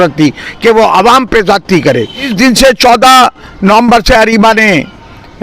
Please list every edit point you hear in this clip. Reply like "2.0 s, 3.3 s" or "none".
2.3 s

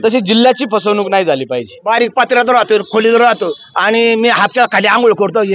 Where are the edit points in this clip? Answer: 1.8 s, 3.7 s

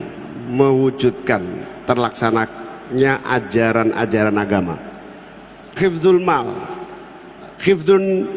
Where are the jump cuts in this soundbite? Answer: 5.6 s

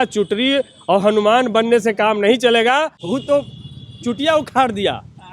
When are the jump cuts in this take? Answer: 3.0 s

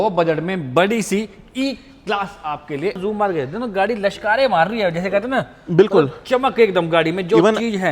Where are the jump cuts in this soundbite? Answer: 3.0 s

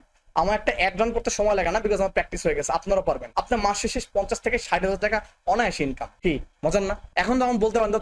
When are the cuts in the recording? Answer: 3.3 s, 6.1 s, 7.0 s

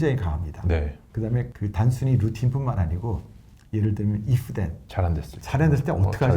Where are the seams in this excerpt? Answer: 1.5 s, 4.8 s

